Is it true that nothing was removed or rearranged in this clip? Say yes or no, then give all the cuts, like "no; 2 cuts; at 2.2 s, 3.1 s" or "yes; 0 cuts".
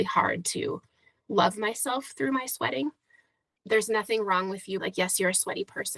no; 1 cut; at 3.5 s